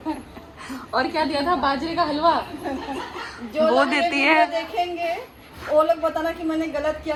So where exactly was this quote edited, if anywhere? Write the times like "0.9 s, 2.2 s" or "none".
none